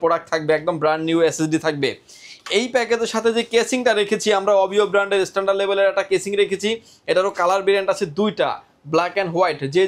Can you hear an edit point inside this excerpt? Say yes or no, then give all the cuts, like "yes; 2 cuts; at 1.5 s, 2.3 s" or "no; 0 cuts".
no; 0 cuts